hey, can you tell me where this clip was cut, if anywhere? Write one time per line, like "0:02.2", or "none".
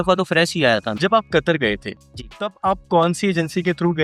0:00.9